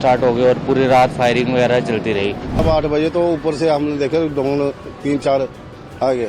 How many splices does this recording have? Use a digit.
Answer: 1